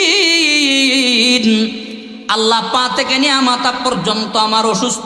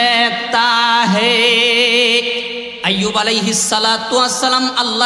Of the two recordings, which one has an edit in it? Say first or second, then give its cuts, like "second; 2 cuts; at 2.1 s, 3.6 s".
second; 1 cut; at 2.6 s